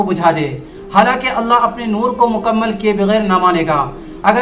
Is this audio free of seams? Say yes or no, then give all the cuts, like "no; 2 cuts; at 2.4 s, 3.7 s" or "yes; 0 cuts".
yes; 0 cuts